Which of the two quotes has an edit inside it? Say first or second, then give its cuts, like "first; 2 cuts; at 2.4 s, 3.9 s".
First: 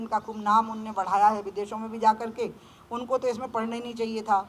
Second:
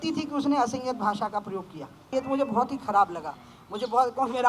second; 1 cut; at 2.1 s